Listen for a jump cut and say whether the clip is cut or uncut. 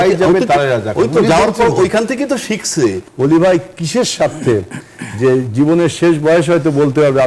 cut